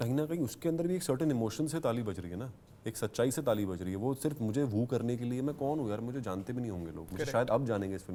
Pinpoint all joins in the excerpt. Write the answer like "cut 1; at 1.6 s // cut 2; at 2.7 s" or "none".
none